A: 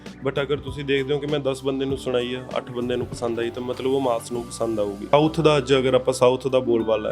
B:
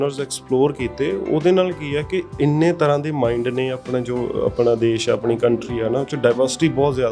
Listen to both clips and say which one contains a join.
A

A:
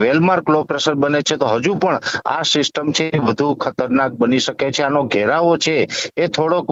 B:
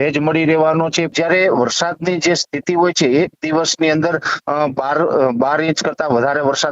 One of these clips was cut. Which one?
B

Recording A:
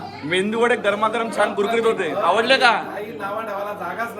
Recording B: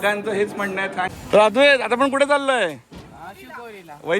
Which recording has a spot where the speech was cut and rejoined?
B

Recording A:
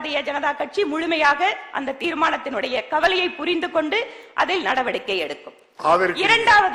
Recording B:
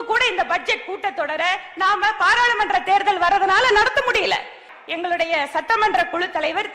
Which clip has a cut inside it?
B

